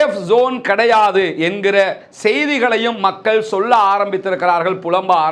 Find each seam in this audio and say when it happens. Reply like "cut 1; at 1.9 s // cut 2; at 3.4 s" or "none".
none